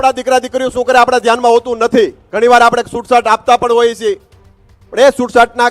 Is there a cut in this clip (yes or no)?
yes